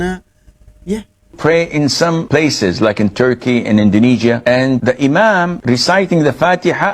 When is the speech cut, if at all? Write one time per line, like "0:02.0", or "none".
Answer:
0:01.3